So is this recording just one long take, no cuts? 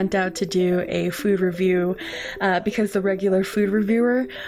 yes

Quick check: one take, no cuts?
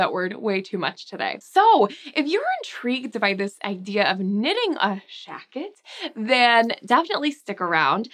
yes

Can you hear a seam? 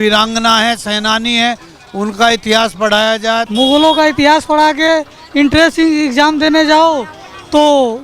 yes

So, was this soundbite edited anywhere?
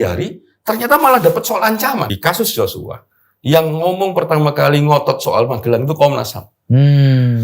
yes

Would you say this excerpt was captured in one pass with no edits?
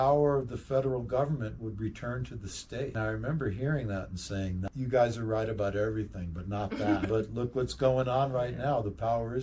no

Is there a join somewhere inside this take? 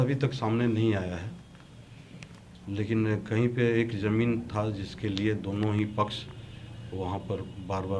no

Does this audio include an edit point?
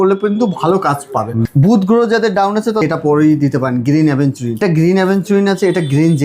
yes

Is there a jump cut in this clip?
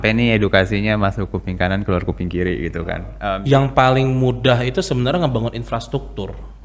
yes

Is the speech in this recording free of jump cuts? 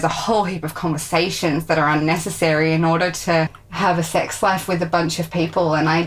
no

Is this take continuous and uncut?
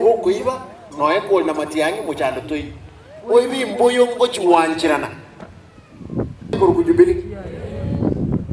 no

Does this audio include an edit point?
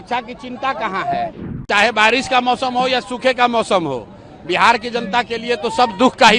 yes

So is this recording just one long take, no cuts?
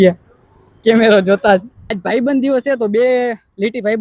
no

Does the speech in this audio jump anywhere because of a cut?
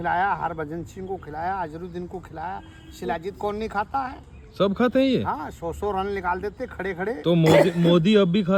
no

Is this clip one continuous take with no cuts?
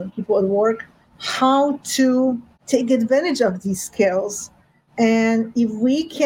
no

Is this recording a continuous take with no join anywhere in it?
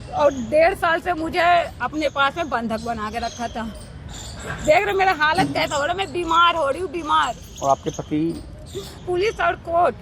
no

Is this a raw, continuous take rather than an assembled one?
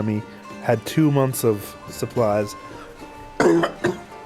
yes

